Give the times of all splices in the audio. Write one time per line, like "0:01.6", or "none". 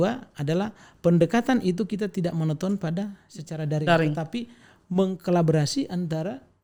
none